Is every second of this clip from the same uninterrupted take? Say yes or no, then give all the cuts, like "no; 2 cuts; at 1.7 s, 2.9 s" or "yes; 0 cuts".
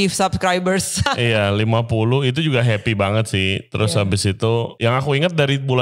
no; 2 cuts; at 1.0 s, 4.7 s